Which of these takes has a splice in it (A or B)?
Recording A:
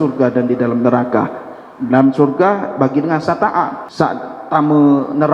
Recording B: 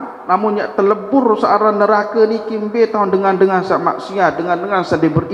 A